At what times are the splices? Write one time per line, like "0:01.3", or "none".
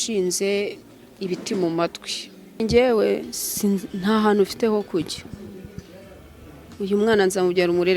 0:02.6